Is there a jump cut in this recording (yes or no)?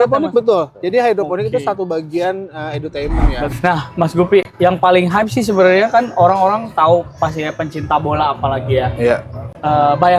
yes